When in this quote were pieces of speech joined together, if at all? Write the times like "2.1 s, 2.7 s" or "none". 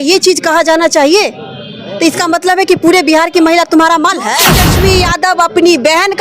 4.7 s